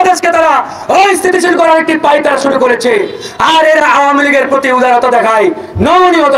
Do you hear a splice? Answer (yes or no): no